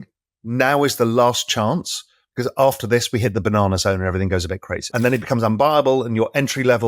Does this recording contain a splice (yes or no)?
yes